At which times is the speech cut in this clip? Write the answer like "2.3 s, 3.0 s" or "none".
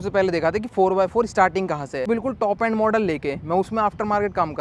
2.1 s